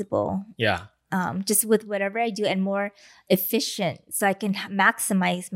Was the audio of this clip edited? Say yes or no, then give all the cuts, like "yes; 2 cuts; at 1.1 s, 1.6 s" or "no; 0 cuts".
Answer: no; 0 cuts